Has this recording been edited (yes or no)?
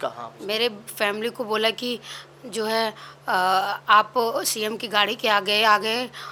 no